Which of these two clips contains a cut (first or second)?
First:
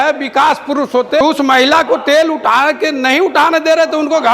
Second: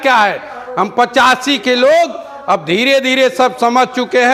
first